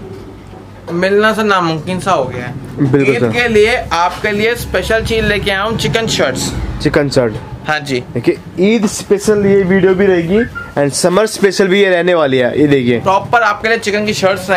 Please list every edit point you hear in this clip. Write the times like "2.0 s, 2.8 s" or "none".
none